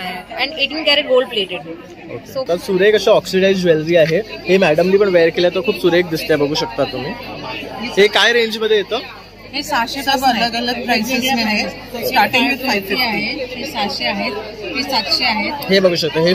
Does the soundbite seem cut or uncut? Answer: cut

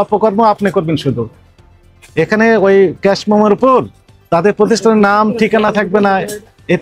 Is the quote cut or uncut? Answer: uncut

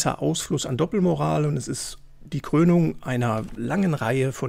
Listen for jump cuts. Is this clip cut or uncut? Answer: cut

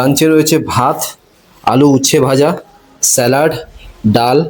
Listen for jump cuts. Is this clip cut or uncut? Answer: uncut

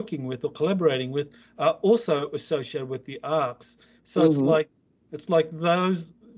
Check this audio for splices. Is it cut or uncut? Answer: uncut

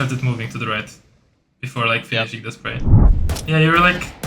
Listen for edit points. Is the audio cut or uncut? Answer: cut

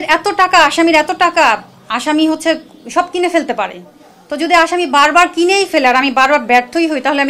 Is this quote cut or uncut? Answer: uncut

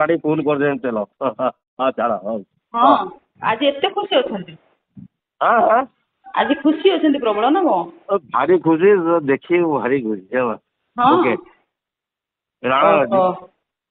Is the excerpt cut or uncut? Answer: uncut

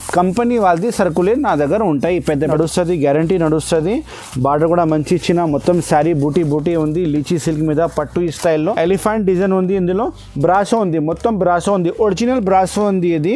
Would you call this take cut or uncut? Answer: cut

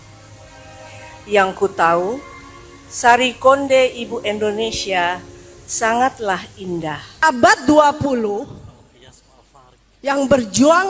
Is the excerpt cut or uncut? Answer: cut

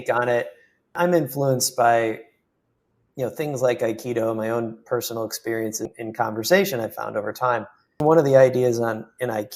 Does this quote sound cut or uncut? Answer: cut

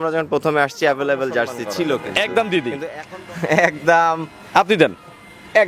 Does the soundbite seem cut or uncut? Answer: cut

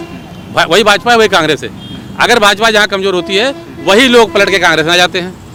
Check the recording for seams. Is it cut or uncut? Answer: uncut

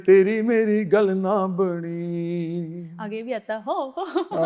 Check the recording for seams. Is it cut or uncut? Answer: uncut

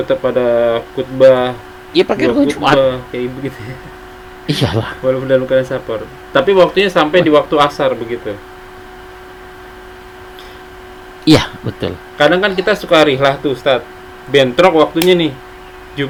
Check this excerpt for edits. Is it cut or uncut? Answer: uncut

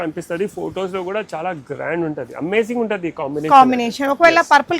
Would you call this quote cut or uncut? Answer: uncut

